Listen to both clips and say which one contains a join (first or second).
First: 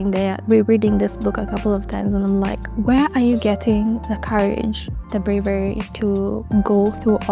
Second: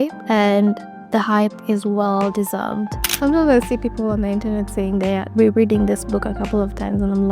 second